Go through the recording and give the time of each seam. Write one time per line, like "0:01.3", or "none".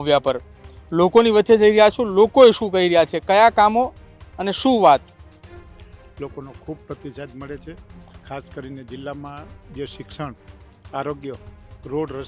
none